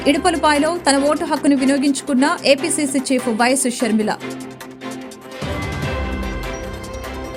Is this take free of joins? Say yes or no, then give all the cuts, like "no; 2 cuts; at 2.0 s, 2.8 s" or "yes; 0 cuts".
yes; 0 cuts